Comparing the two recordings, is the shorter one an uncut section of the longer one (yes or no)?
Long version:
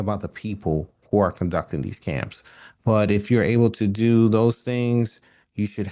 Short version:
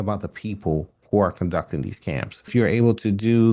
no